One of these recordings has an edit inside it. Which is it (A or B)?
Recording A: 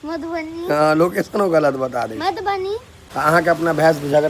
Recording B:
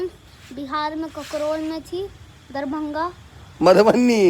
A